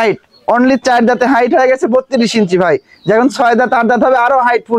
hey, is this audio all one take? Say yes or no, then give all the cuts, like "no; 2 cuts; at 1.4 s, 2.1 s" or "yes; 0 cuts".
yes; 0 cuts